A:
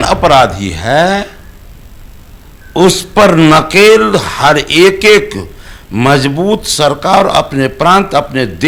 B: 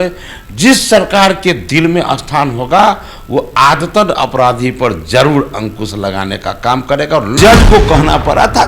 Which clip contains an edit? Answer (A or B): B